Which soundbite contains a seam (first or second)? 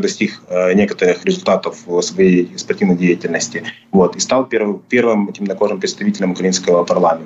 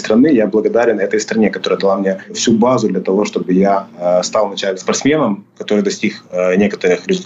second